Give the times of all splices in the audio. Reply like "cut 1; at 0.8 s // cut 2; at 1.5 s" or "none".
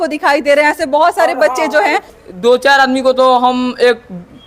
cut 1; at 2.1 s